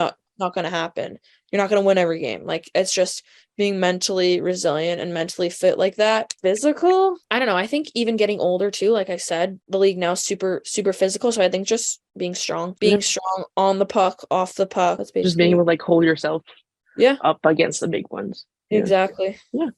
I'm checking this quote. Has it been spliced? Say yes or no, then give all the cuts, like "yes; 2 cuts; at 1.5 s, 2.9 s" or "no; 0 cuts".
no; 0 cuts